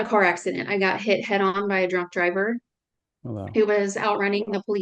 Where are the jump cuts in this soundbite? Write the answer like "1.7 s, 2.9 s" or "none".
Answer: none